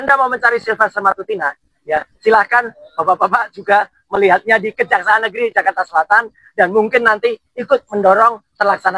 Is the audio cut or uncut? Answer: uncut